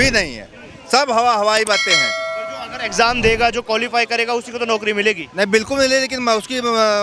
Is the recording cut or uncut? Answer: uncut